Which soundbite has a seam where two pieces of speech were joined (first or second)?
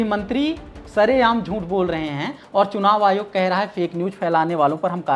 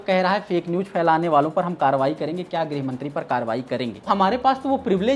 second